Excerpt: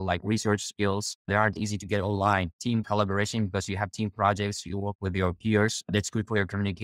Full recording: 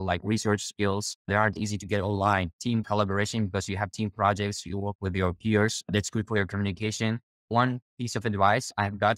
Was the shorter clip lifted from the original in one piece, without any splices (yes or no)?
yes